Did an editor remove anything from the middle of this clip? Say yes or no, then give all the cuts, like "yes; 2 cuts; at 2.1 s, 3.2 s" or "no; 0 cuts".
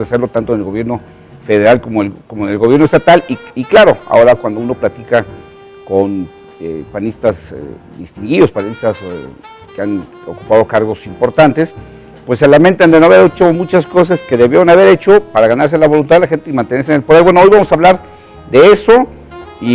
yes; 1 cut; at 11.7 s